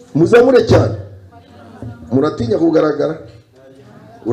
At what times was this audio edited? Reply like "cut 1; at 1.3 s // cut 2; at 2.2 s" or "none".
none

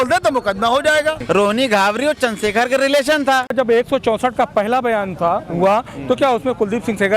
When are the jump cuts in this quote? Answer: cut 1; at 1.2 s // cut 2; at 3.5 s

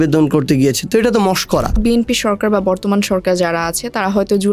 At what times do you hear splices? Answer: cut 1; at 1.8 s

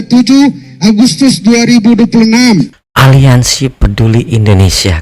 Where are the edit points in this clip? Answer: cut 1; at 2.8 s

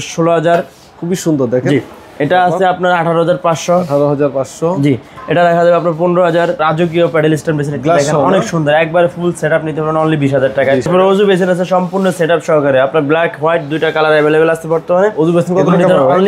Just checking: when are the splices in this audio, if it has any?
cut 1; at 6.6 s // cut 2; at 10.9 s

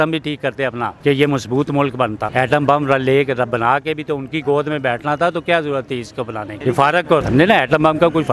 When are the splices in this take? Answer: cut 1; at 0.9 s // cut 2; at 2.2 s // cut 3; at 6.5 s // cut 4; at 7.2 s

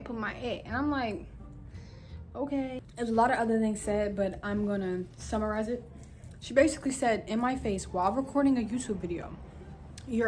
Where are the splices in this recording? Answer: cut 1; at 2.8 s

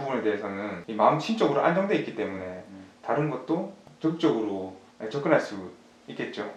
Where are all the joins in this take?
none

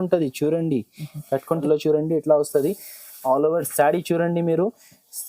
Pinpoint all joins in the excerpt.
cut 1; at 1.6 s

